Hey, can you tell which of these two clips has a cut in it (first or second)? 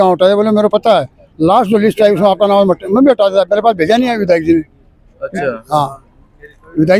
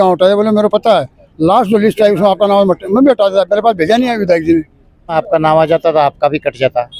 second